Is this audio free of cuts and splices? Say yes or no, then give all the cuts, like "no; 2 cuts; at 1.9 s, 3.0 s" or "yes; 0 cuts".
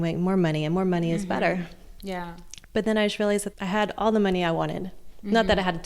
no; 2 cuts; at 2.7 s, 3.5 s